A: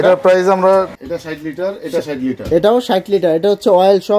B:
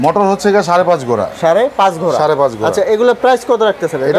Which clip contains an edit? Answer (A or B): A